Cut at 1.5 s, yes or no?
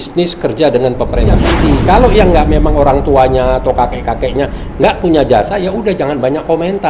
yes